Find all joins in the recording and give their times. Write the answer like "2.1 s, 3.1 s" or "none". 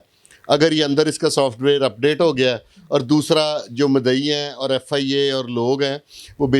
none